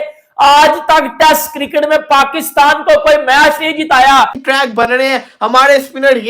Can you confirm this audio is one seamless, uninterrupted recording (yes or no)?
no